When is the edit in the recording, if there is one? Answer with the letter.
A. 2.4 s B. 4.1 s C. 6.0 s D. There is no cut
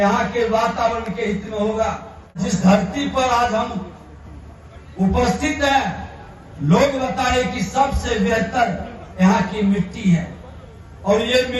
A